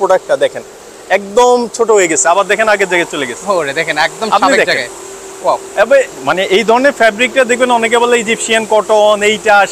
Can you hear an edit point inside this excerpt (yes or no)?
no